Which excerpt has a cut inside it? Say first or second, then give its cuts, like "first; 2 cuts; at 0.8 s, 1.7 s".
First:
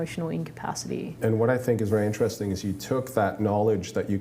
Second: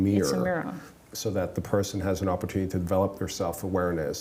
first; 1 cut; at 1.2 s